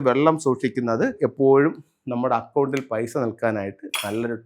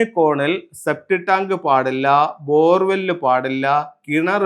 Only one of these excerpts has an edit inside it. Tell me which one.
first; 1 cut; at 1.2 s

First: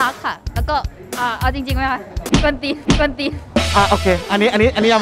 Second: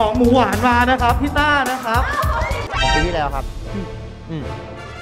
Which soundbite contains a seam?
second; 1 cut; at 2.6 s

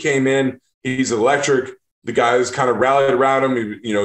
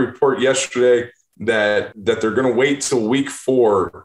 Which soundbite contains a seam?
second; 1 cut; at 1.9 s

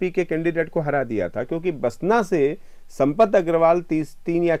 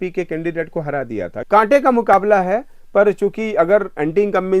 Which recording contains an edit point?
second; 1 cut; at 1.4 s

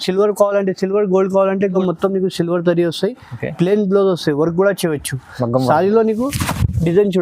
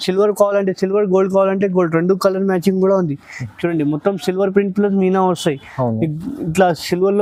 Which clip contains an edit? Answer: first; 1 cut; at 1.8 s

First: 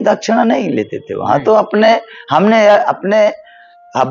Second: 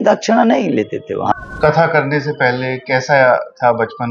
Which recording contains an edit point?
second; 1 cut; at 1.3 s

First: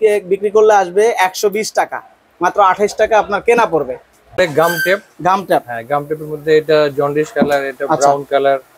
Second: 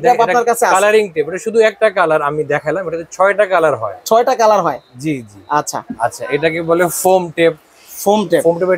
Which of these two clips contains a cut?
first; 1 cut; at 4.4 s

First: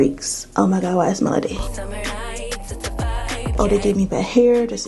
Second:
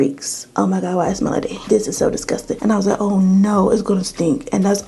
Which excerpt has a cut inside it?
first; 2 cuts; at 1.6 s, 3.5 s

